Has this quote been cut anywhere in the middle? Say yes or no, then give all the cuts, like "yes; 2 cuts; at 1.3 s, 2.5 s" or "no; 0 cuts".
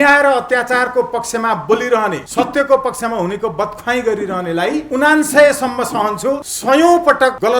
yes; 2 cuts; at 2.3 s, 4.9 s